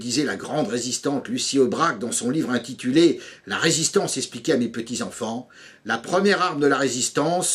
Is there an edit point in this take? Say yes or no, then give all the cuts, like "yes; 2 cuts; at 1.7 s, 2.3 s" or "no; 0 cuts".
yes; 1 cut; at 5.8 s